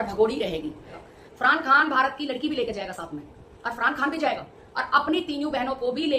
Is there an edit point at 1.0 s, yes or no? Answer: yes